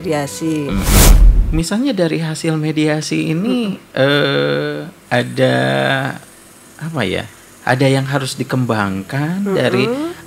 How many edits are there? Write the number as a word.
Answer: one